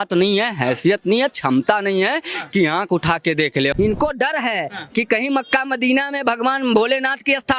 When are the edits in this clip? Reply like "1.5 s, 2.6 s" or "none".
3.7 s